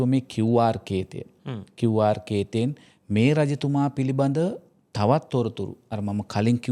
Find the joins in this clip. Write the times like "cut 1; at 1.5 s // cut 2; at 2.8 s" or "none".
none

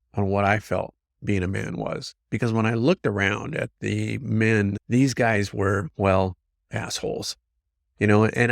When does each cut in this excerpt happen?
cut 1; at 4.8 s

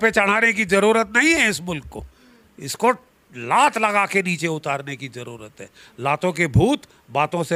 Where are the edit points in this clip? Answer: none

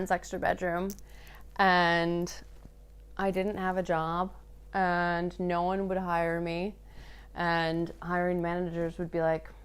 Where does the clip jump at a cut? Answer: none

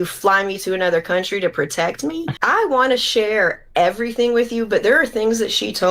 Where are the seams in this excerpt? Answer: cut 1; at 2.4 s

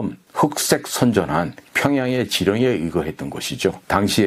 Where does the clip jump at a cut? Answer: none

